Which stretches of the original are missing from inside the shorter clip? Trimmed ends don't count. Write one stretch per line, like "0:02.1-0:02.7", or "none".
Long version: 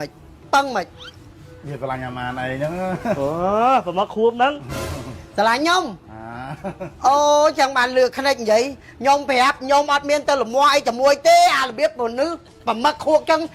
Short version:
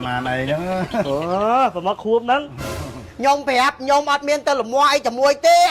0:05.1-0:08.8